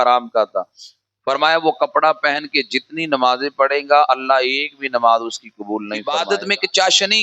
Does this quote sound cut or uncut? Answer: cut